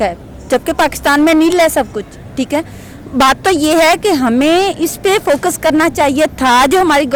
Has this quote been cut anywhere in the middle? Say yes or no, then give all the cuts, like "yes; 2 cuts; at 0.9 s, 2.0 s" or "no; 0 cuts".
no; 0 cuts